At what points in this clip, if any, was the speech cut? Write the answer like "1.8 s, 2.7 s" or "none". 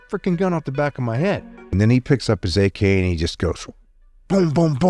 1.7 s